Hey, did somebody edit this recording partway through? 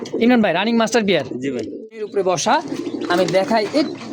yes; 1 cut; at 2.0 s

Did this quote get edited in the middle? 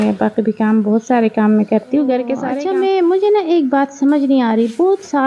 yes; 1 cut; at 2.5 s

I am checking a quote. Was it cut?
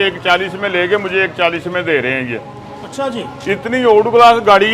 no; 0 cuts

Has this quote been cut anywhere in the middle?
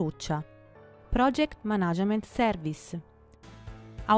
no; 0 cuts

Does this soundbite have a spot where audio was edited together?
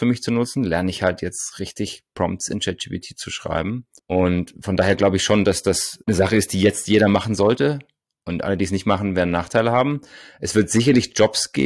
no; 0 cuts

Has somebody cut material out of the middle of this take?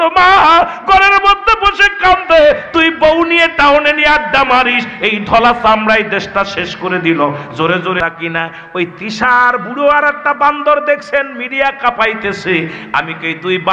yes; 1 cut; at 8.0 s

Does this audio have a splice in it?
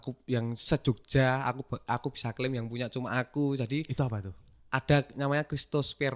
no; 0 cuts

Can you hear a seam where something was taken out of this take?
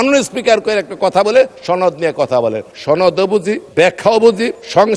no; 0 cuts

